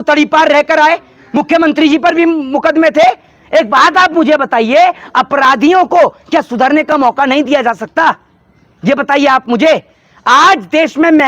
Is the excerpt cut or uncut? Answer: uncut